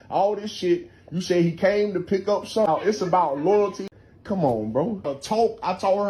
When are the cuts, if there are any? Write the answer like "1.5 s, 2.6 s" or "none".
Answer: 3.8 s, 5.1 s